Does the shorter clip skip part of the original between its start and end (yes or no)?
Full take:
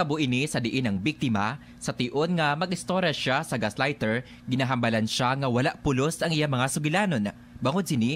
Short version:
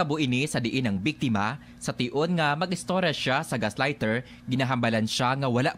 no